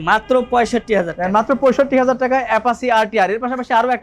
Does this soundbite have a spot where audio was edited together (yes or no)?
no